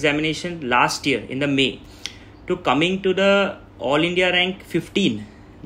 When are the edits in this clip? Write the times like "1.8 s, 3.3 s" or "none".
none